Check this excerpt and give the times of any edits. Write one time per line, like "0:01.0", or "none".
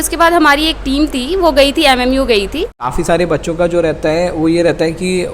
0:03.0